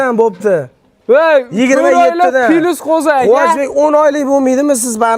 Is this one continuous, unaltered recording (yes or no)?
yes